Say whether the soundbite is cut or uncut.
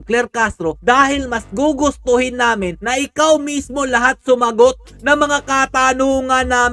uncut